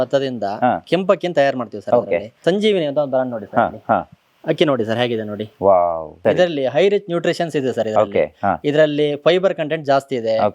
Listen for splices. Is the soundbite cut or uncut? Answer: cut